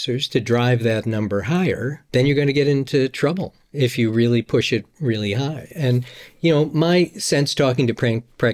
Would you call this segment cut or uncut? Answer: cut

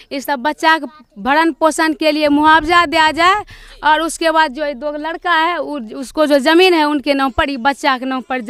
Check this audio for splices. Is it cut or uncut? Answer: uncut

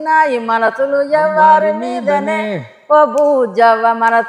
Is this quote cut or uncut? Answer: uncut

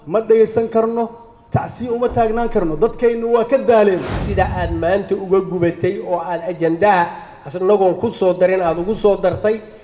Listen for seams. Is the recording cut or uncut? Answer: cut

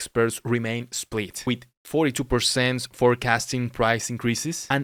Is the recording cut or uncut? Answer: uncut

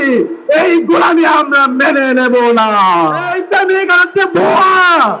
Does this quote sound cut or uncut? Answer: cut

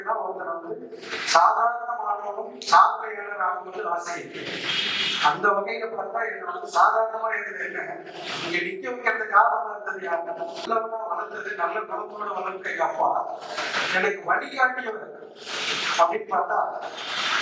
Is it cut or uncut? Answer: cut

